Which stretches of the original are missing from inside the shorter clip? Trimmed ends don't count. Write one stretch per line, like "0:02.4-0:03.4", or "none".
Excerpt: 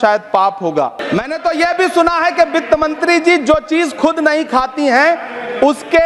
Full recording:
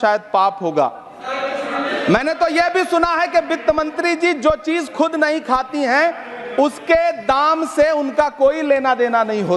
0:01.0-0:01.9